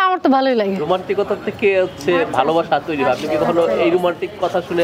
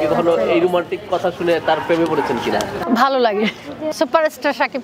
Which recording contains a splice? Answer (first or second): second